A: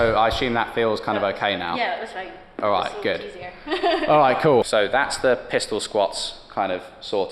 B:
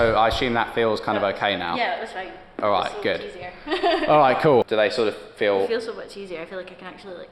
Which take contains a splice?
B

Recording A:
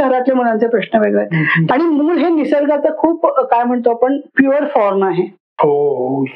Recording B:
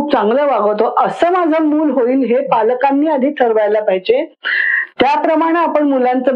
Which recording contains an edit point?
A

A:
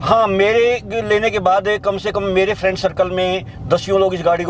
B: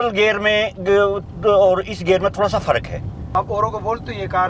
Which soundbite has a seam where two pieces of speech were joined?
B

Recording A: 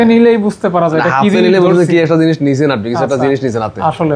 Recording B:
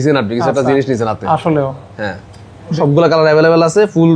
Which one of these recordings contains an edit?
B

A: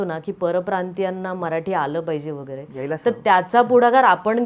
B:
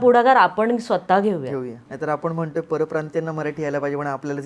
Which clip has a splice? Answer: B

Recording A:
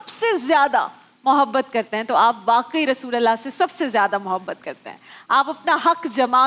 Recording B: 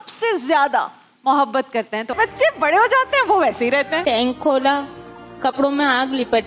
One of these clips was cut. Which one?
B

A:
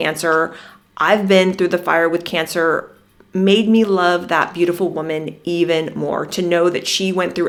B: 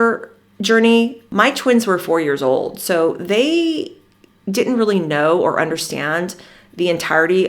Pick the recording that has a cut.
B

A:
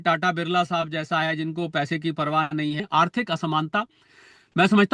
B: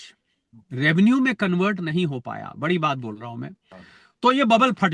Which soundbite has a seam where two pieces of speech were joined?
A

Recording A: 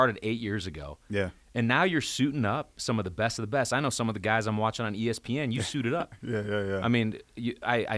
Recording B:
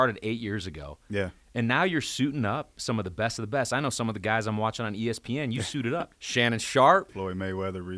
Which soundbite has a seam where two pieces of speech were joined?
B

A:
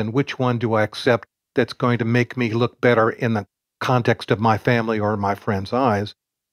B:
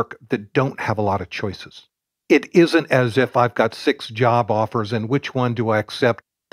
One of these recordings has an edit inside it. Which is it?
B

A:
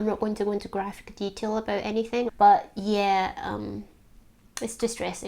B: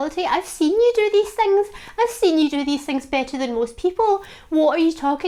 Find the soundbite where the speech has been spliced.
A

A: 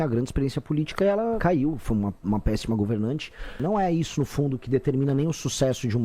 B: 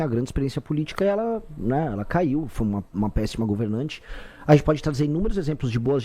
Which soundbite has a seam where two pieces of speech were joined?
A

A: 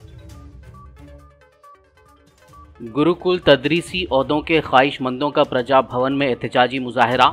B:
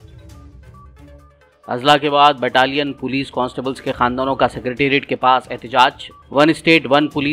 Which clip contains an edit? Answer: A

